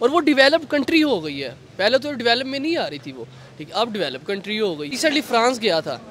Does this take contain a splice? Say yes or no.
yes